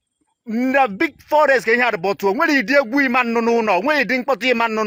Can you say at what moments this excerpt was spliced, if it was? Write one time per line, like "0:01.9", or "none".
none